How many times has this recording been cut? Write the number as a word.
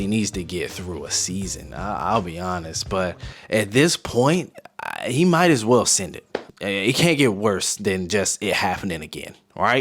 one